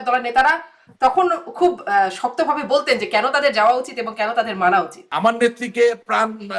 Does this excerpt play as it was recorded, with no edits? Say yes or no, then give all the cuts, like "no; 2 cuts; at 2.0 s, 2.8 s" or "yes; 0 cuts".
no; 1 cut; at 5.0 s